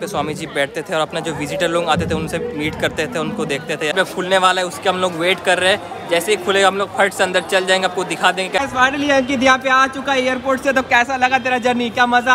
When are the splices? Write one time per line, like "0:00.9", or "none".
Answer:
0:03.9
0:08.6